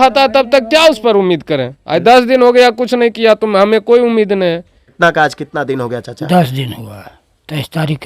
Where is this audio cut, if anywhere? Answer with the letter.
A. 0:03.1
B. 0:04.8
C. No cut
B